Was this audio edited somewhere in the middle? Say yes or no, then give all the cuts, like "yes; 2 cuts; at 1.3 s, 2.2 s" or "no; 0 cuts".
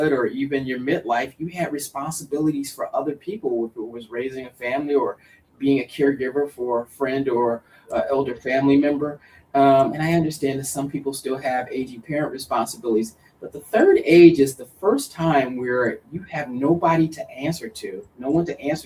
no; 0 cuts